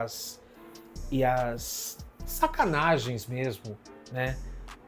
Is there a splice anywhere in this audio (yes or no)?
no